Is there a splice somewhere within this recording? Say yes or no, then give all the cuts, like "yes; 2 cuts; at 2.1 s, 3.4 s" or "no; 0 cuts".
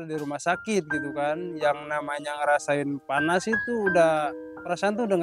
no; 0 cuts